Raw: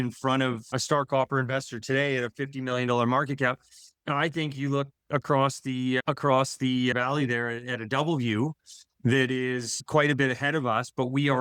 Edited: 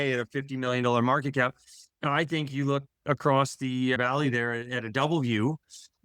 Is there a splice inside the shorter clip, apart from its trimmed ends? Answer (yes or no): yes